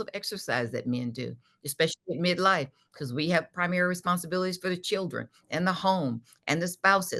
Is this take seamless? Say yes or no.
yes